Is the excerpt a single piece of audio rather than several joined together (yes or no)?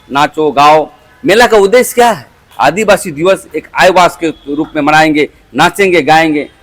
no